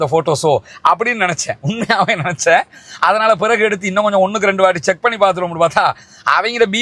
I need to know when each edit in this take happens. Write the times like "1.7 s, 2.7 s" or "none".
none